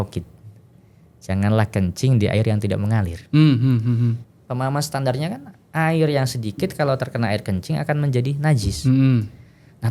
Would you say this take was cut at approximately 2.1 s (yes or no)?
no